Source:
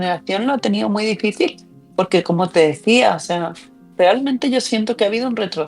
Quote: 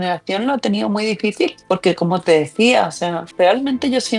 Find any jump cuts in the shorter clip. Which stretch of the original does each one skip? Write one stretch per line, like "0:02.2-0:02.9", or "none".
0:01.6-0:01.9
0:03.5-0:03.8